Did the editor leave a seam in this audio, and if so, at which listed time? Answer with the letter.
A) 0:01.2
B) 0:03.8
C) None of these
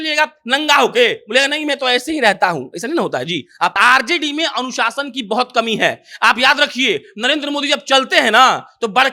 B